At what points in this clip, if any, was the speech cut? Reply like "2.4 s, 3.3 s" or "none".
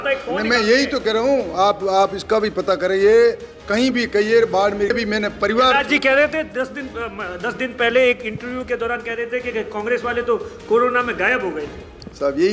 4.9 s